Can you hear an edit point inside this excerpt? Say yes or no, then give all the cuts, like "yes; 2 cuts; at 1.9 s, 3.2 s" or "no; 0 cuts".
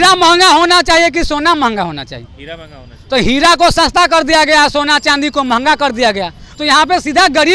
no; 0 cuts